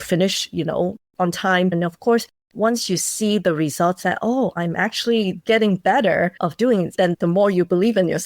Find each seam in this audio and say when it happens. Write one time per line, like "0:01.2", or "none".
0:01.7
0:07.0